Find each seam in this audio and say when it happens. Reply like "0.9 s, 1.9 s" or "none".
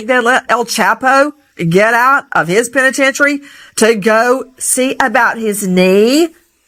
none